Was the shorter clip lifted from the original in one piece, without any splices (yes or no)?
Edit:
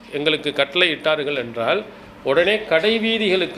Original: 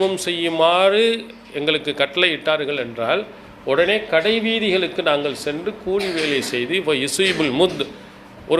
yes